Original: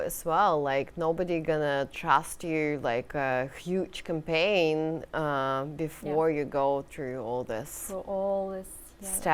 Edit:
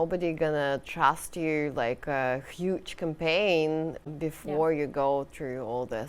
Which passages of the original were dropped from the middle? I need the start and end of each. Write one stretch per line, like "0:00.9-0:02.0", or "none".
0:05.1-0:05.6